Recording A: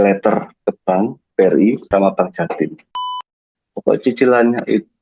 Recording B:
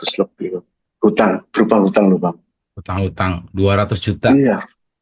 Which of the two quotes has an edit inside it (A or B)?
A